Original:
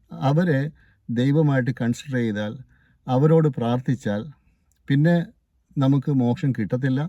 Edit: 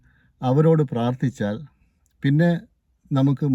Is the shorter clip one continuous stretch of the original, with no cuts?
yes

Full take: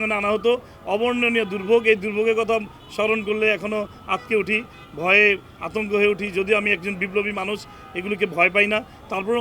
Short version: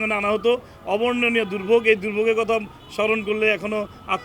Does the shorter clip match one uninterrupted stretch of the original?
yes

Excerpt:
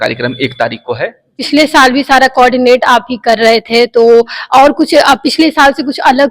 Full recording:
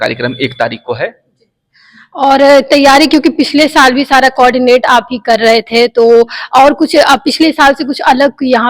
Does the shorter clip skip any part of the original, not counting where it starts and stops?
yes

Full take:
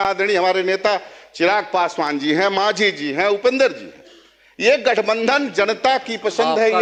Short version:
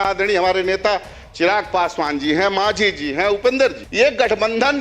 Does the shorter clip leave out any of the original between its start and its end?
yes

